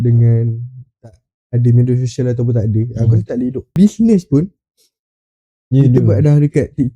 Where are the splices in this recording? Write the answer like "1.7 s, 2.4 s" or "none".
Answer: 3.8 s